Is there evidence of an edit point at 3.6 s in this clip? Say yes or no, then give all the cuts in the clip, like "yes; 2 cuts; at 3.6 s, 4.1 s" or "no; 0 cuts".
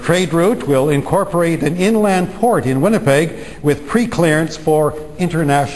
no; 0 cuts